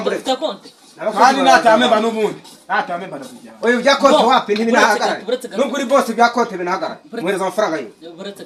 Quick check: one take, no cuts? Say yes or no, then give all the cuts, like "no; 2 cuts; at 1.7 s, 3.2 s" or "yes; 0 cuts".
yes; 0 cuts